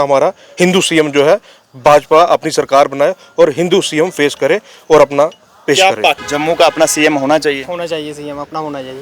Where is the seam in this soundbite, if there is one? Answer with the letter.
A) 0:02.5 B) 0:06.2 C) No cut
B